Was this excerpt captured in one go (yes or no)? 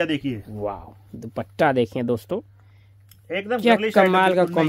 yes